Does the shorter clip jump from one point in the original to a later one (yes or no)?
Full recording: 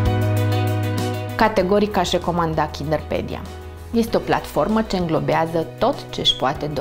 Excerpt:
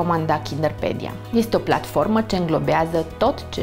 yes